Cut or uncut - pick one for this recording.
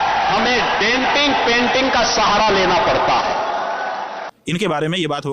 cut